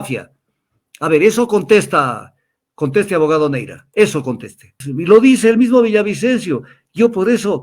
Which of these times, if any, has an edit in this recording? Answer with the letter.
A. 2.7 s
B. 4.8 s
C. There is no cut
B